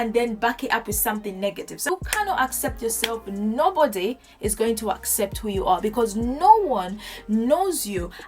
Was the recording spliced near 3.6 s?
no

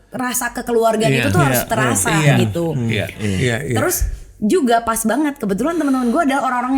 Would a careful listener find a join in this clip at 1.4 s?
no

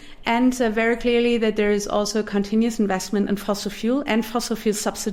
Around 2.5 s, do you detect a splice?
no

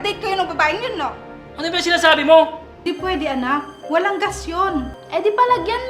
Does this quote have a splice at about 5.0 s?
yes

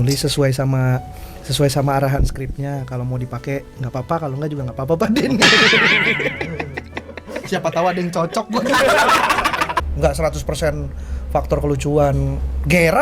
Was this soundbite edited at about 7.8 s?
no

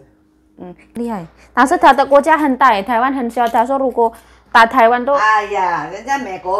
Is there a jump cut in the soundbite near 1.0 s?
yes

